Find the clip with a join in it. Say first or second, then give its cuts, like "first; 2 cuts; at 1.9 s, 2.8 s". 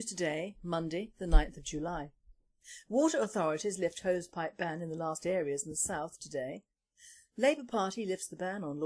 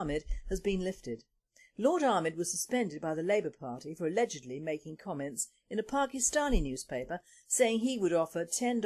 second; 1 cut; at 4.4 s